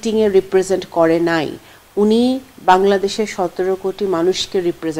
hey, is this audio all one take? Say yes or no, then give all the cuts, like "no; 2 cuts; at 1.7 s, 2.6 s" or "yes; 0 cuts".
yes; 0 cuts